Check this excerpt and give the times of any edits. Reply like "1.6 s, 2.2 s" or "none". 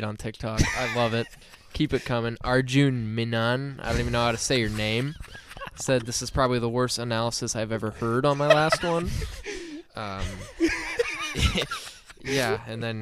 none